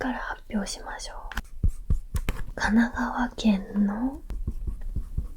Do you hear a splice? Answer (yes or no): yes